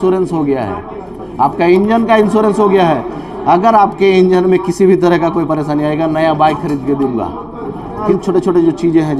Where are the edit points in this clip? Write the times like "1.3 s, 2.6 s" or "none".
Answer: 8.1 s